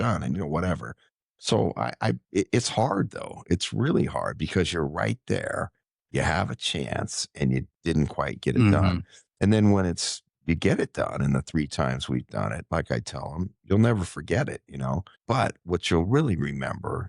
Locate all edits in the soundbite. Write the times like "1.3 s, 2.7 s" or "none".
15.1 s